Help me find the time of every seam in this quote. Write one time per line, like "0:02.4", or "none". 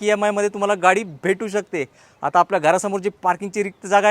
none